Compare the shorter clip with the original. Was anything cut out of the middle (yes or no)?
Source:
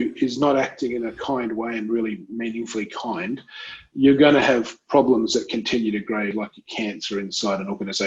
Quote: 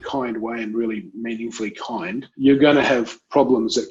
yes